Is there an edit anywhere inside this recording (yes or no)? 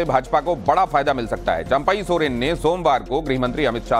no